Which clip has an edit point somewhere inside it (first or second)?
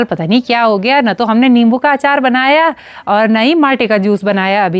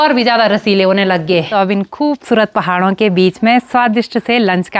second